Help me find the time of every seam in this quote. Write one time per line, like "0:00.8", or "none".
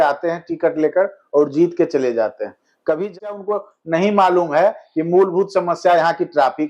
0:03.3

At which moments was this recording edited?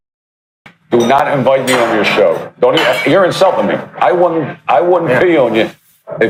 none

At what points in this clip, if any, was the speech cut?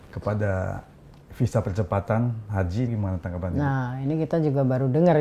none

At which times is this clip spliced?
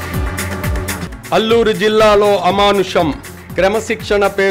0:01.0

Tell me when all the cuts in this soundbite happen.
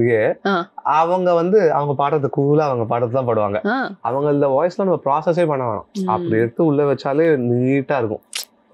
0:03.9

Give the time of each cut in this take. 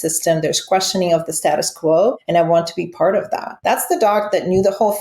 0:02.2
0:03.5

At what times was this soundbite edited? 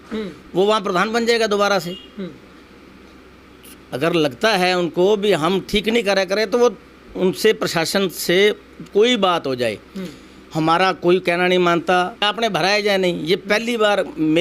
0:12.3

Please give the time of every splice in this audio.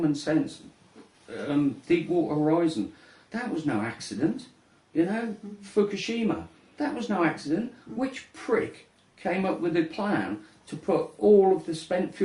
0:03.5

